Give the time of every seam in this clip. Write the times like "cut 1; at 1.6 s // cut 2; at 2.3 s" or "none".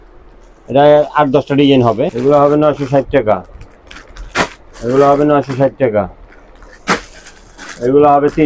cut 1; at 2.1 s